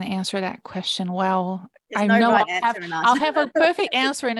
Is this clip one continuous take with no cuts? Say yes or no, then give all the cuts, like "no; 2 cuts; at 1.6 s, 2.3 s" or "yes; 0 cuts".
yes; 0 cuts